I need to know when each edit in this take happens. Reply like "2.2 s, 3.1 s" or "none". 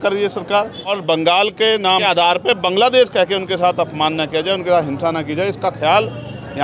1.0 s, 2.0 s